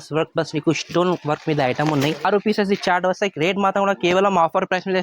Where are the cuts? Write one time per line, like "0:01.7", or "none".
0:02.3